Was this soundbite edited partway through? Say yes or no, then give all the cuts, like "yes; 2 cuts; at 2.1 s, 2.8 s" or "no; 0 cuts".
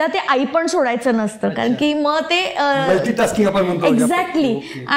no; 0 cuts